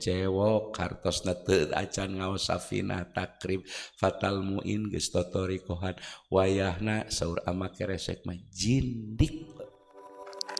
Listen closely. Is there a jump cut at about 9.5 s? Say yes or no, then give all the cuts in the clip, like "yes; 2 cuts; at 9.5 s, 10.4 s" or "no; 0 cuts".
yes; 1 cut; at 9.5 s